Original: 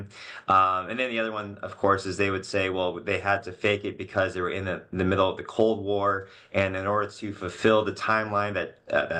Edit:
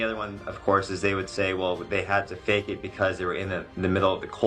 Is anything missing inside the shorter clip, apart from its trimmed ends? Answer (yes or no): no